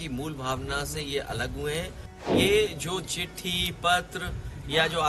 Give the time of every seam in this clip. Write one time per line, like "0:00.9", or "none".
0:02.3